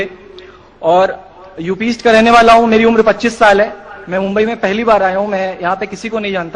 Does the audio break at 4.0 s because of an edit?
no; 1 cut; at 1.5 s

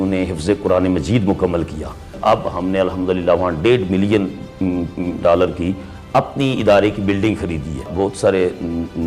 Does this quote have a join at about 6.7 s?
no; 2 cuts; at 2.1 s, 7.9 s

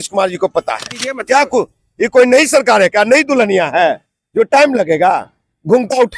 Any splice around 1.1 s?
yes; 1 cut; at 1.1 s

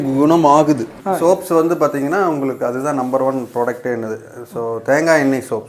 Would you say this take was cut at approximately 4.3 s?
no; 1 cut; at 0.9 s

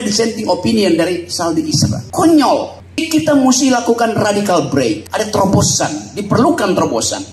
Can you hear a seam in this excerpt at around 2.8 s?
yes; 3 cuts; at 2.0 s, 2.8 s, 5.1 s

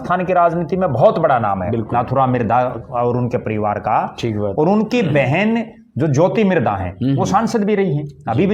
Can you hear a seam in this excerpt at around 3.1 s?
no; 0 cuts

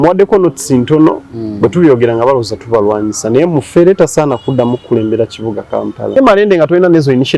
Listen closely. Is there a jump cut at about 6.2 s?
yes; 1 cut; at 6.2 s

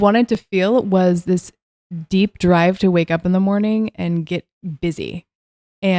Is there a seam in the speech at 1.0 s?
no; 0 cuts

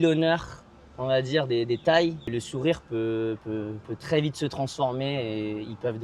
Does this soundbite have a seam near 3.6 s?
no; 1 cut; at 2.3 s

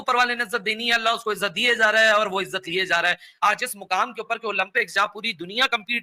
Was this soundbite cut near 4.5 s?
no; 0 cuts

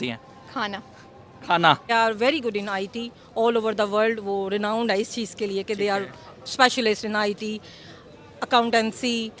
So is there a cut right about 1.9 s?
yes; 1 cut; at 1.9 s

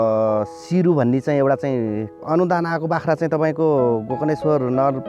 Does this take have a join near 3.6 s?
no; 1 cut; at 2.2 s

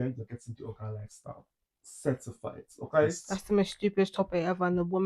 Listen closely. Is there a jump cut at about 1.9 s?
no; 1 cut; at 3.3 s

